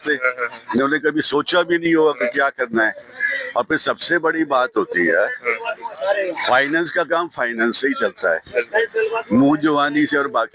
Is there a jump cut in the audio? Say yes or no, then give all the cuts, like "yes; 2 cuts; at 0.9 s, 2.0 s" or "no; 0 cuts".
no; 0 cuts